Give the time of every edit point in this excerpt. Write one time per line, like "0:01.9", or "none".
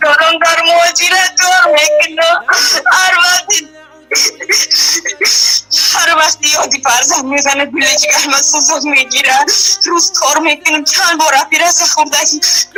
none